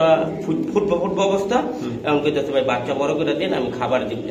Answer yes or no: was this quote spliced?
no